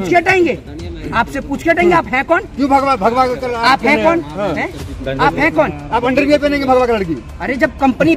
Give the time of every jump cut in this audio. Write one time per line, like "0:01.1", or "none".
none